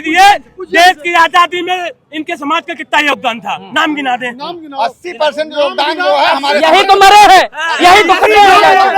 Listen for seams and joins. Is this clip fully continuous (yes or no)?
yes